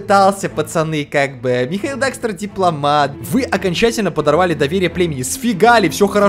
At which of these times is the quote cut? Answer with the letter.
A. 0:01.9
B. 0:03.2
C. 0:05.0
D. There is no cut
B